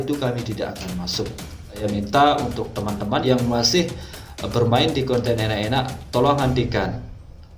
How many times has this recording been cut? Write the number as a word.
two